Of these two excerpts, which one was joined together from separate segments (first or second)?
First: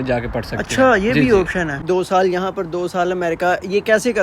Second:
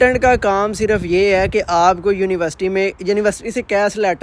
first